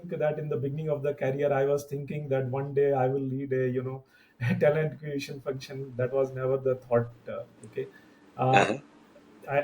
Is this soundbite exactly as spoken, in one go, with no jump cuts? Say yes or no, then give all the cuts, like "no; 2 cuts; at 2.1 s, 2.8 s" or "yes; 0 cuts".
yes; 0 cuts